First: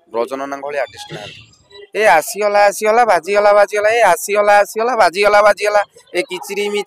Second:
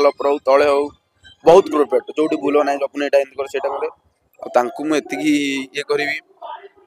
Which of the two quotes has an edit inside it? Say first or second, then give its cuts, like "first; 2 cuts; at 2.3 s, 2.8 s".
first; 1 cut; at 1.8 s